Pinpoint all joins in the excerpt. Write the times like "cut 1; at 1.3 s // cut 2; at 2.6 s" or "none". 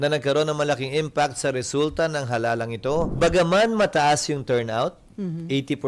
cut 1; at 3.1 s